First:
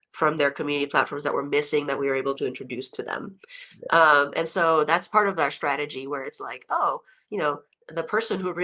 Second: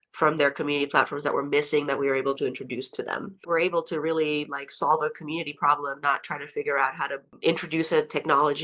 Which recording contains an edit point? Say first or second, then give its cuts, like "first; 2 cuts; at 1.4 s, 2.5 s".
second; 2 cuts; at 3.4 s, 7.3 s